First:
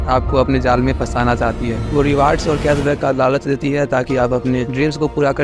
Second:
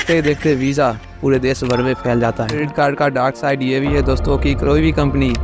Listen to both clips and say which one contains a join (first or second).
second